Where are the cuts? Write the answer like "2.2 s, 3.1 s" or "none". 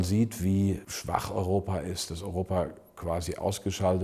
0.9 s